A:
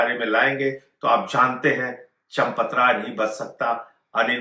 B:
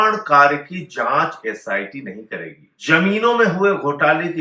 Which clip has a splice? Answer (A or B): B